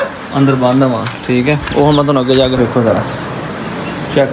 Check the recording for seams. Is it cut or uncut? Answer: cut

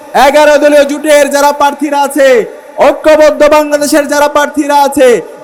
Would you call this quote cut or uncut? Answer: uncut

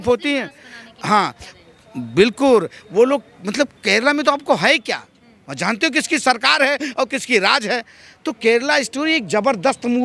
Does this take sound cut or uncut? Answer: uncut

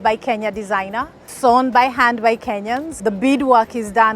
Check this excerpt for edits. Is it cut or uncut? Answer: cut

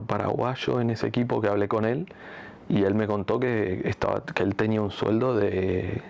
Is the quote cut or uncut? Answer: uncut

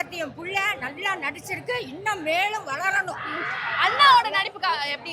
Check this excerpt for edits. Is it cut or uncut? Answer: uncut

